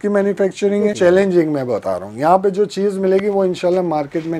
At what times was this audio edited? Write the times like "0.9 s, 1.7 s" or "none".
0.9 s

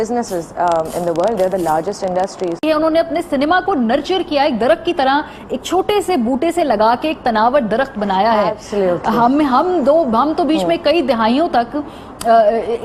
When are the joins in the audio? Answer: 2.6 s

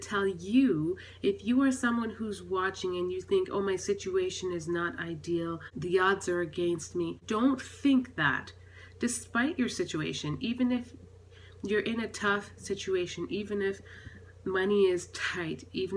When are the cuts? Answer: 5.7 s, 7.2 s

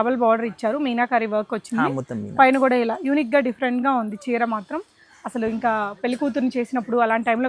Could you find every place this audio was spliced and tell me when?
none

